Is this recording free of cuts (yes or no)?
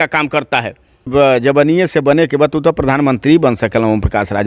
no